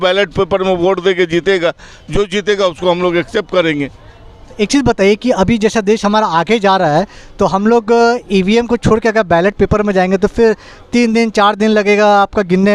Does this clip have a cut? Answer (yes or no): no